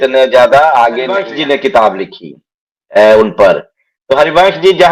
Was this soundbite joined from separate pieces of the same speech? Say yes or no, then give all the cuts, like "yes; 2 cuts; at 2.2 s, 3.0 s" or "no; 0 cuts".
yes; 1 cut; at 1.3 s